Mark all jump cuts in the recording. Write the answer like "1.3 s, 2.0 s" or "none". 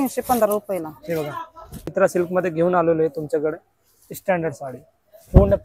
1.9 s

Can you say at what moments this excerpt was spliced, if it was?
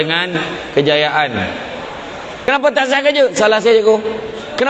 2.4 s

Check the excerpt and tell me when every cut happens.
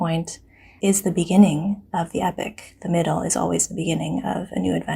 none

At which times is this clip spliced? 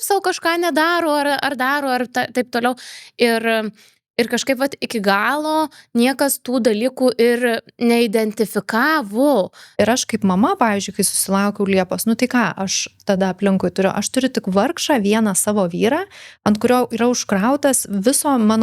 9.6 s

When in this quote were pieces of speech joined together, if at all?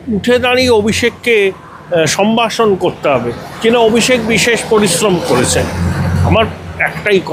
none

